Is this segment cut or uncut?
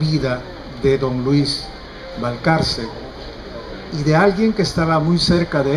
uncut